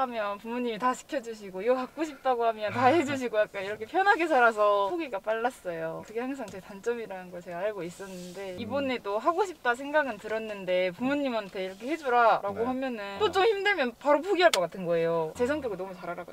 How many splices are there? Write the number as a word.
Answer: zero